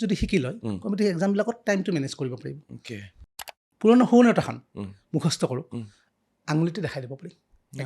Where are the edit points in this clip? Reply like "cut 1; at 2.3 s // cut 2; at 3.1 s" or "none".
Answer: cut 1; at 3.5 s